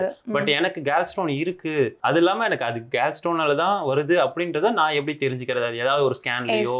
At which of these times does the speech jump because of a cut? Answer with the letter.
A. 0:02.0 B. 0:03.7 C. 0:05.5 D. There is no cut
A